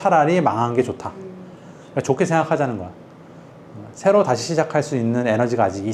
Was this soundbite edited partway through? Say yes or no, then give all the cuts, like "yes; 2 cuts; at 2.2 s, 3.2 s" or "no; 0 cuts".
no; 0 cuts